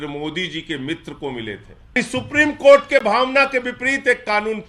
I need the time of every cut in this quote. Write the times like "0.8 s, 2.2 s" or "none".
2.0 s